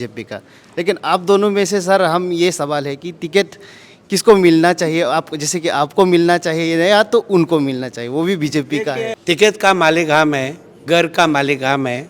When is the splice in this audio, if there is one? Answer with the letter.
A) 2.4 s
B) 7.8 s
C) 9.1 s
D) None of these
C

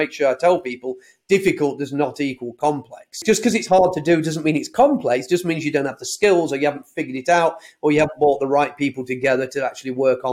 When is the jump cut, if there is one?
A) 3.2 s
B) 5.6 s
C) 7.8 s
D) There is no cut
A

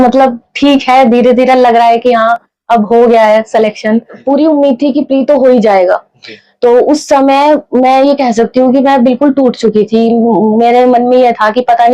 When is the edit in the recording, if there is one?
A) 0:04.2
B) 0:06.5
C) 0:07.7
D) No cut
A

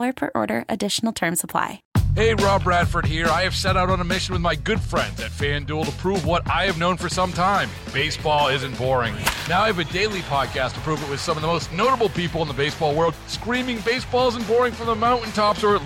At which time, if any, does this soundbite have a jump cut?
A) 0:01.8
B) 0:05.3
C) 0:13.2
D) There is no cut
A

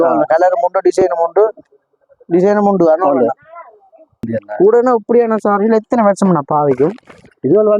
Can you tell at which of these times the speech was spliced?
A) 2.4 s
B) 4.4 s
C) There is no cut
B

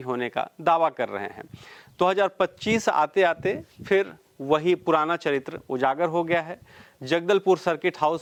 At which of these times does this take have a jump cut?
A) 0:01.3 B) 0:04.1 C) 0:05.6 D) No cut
D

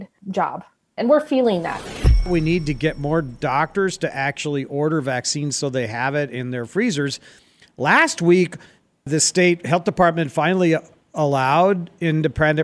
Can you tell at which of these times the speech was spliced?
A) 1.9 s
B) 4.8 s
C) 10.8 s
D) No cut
A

